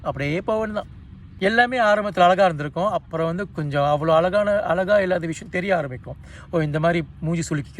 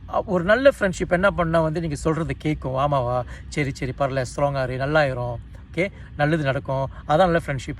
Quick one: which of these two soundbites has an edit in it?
first; 1 cut; at 1.3 s

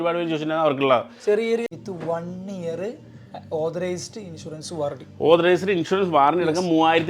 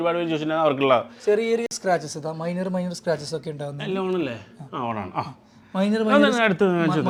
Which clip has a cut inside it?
first; 1 cut; at 1.7 s

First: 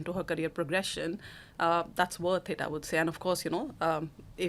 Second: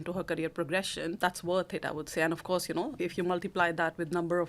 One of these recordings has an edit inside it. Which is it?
second; 2 cuts; at 1.2 s, 3.0 s

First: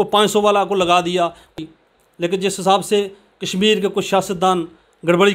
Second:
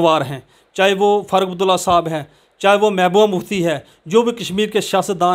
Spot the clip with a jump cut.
first; 1 cut; at 1.5 s

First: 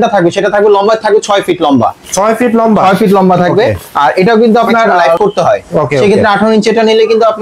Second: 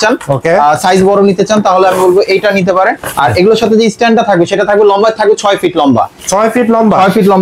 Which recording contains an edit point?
first; 1 cut; at 5.2 s

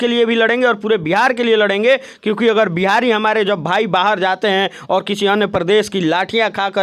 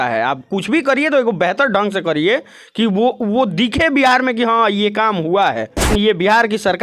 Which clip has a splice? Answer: second; 1 cut; at 5.9 s

